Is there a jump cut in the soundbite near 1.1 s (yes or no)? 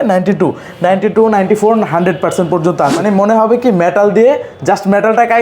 no